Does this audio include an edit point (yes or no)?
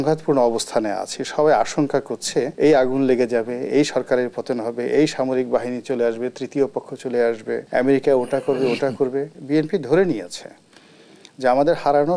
yes